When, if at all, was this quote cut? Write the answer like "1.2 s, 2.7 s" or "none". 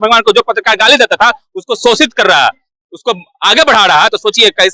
none